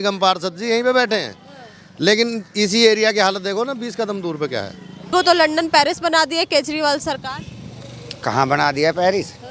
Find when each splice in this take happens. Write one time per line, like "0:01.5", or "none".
0:05.1